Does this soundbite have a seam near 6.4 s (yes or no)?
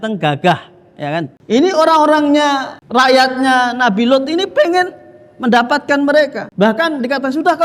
yes